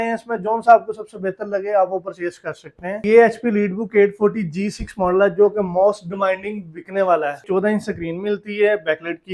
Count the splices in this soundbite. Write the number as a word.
two